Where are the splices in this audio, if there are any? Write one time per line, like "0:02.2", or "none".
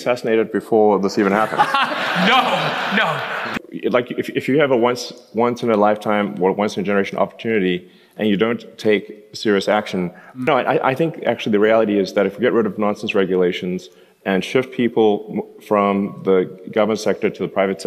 0:10.4